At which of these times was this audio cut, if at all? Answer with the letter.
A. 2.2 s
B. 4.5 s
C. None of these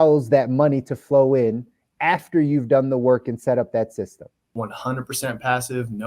B